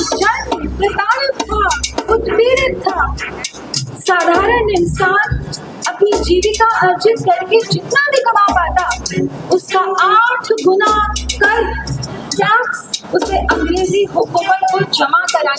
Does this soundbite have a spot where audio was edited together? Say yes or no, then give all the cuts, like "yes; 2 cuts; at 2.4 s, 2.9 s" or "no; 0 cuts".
no; 0 cuts